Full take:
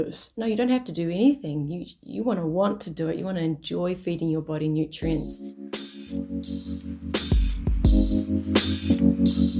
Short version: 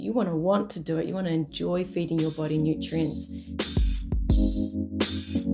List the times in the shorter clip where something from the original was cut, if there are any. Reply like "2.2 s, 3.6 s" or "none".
3.2 s